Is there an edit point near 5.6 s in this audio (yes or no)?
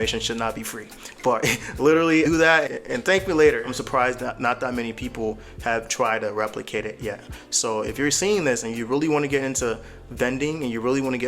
no